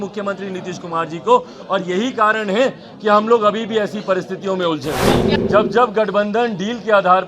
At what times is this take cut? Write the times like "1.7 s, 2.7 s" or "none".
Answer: 5.3 s